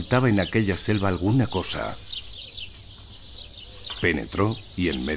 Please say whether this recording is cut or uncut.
cut